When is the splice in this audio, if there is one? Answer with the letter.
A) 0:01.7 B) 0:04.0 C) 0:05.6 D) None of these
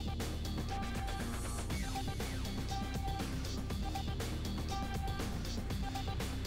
D